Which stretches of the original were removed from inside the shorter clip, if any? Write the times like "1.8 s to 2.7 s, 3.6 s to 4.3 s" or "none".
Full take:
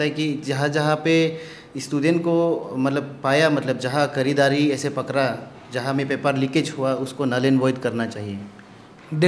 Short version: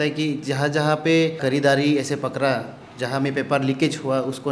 1.4 s to 4.1 s